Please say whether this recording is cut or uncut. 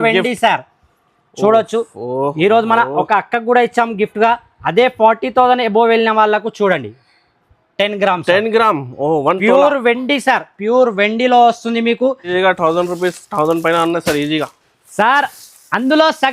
cut